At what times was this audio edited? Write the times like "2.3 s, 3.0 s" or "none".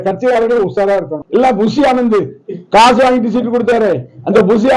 1.2 s